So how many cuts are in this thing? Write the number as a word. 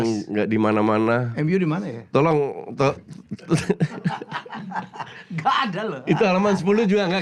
zero